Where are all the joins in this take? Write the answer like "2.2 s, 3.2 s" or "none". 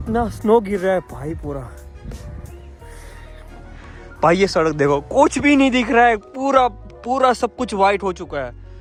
none

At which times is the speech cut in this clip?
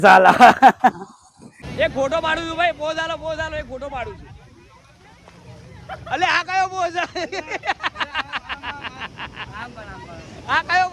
1.6 s

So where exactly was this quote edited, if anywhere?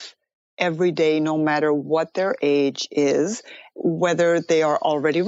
none

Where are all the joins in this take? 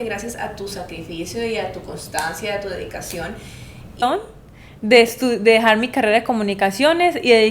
4.0 s

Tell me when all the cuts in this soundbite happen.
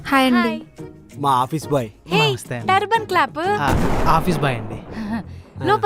none

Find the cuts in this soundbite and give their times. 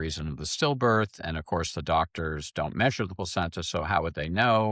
none

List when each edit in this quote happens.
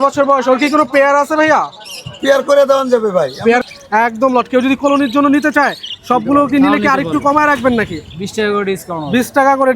3.6 s

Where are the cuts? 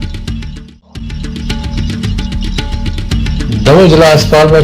1.2 s, 3.3 s

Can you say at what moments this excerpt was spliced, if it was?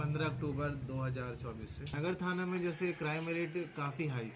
1.9 s

